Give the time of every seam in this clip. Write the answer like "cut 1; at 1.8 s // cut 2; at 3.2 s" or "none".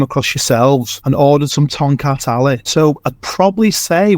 cut 1; at 0.9 s // cut 2; at 2.6 s